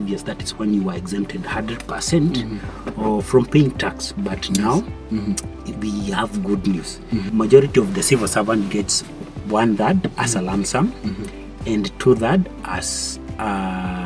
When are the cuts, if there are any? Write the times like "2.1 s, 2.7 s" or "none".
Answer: 7.3 s